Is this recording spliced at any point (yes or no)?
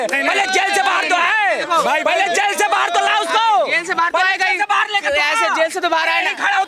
no